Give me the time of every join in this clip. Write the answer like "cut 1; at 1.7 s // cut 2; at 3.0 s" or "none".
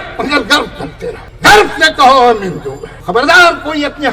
cut 1; at 1.2 s // cut 2; at 2.9 s